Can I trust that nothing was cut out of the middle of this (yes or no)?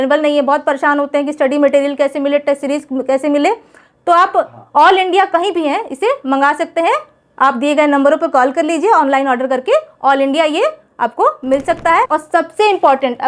no